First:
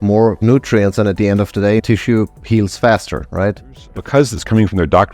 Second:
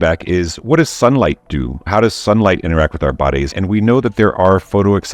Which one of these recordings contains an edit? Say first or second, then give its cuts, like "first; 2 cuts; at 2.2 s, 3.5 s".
first; 1 cut; at 3.8 s